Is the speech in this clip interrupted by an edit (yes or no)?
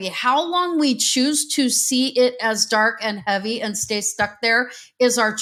no